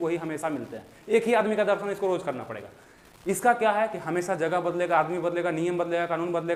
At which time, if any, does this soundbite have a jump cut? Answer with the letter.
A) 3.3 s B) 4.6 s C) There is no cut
C